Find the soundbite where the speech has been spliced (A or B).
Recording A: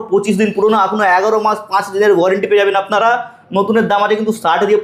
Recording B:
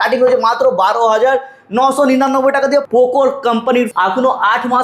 B